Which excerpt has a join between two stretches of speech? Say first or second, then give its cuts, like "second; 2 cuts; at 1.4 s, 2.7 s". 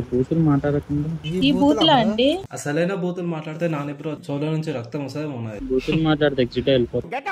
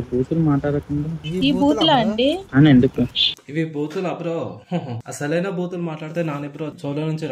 first; 2 cuts; at 2.4 s, 5.6 s